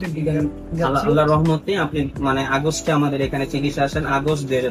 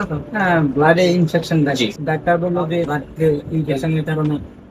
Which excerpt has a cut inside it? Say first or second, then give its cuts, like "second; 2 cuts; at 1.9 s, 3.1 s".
second; 2 cuts; at 2.0 s, 2.9 s